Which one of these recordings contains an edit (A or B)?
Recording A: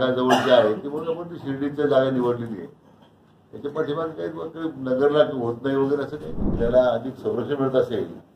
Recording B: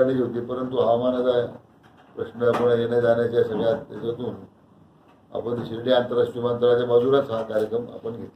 A